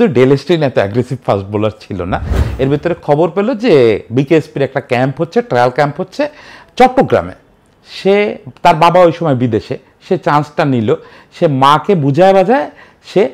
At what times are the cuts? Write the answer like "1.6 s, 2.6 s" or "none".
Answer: 2.4 s